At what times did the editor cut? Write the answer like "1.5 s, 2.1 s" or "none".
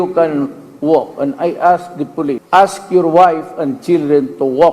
2.4 s